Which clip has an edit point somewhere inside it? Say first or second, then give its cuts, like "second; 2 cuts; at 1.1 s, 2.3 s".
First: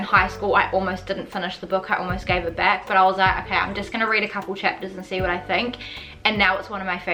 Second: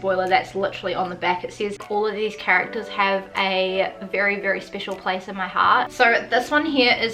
second; 2 cuts; at 1.8 s, 5.9 s